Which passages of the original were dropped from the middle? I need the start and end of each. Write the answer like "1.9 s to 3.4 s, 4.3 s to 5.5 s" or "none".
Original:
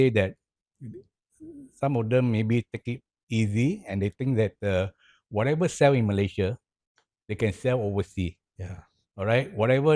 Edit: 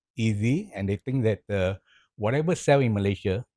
none